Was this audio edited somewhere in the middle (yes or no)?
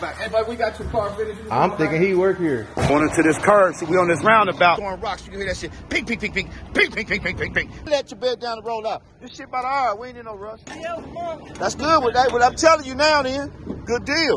yes